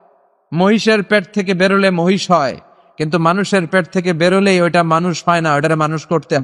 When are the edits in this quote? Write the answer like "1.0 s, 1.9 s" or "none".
none